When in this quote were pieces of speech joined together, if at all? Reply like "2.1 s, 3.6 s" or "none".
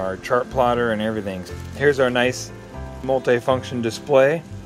1.4 s, 3.0 s